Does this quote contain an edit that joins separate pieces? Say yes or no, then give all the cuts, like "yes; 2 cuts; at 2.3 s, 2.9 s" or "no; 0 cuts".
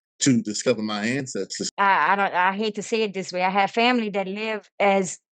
yes; 1 cut; at 1.6 s